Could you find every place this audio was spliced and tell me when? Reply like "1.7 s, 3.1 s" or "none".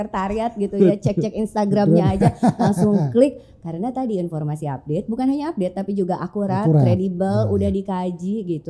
none